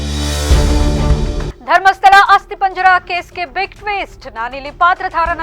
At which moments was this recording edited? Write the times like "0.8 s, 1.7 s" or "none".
1.5 s